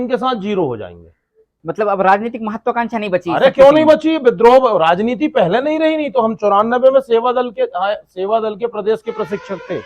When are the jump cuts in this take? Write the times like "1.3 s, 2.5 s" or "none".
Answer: 1.6 s